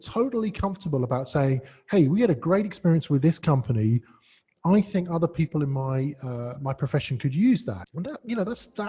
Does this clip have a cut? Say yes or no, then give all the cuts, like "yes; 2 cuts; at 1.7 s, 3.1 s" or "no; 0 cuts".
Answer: yes; 1 cut; at 7.9 s